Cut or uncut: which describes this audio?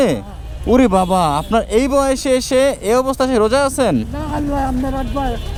uncut